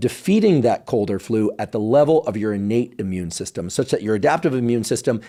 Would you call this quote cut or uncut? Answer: uncut